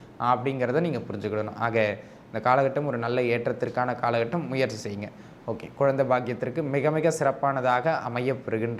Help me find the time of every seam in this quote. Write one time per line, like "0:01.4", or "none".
none